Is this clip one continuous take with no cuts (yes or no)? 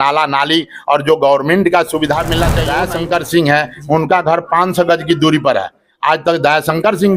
no